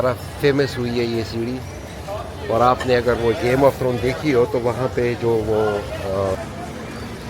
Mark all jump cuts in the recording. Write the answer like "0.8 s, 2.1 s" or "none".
6.4 s